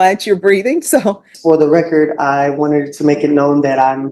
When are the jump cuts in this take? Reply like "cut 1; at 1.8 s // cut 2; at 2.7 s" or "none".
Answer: cut 1; at 1.3 s